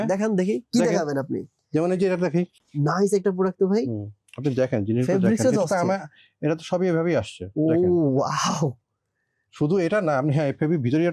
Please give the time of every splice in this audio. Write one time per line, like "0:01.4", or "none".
0:02.6